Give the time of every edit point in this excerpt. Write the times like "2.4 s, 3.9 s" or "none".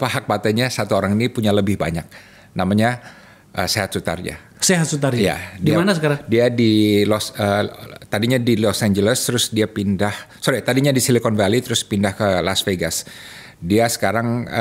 none